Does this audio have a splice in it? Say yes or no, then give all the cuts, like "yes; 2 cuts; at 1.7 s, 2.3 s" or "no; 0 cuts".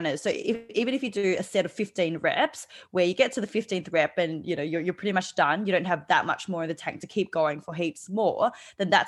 no; 0 cuts